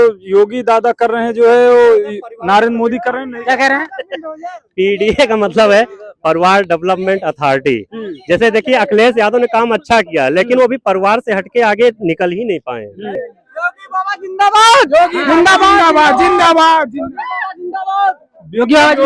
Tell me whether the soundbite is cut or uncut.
cut